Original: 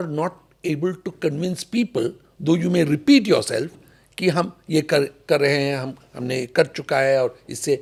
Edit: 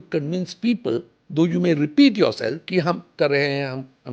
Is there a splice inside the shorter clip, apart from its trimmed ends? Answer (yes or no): yes